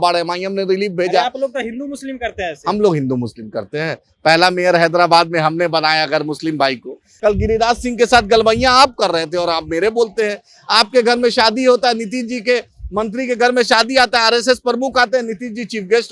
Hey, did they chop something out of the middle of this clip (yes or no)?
yes